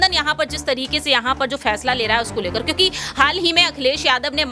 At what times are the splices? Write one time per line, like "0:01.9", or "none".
none